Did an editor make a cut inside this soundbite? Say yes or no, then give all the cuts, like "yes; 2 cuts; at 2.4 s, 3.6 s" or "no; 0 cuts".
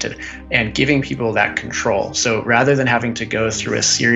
no; 0 cuts